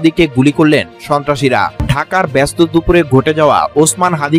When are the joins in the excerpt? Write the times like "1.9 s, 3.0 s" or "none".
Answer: 1.8 s